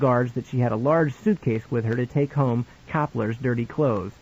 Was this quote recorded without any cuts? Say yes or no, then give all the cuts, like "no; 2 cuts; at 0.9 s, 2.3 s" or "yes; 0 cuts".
no; 1 cut; at 3.3 s